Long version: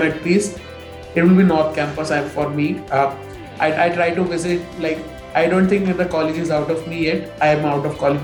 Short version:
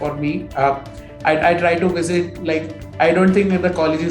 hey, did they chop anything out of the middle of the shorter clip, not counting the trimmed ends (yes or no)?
no